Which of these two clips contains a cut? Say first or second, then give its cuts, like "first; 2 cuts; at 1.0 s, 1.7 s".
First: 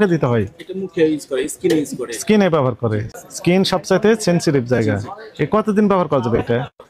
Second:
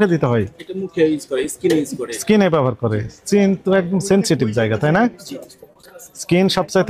first; 1 cut; at 3.1 s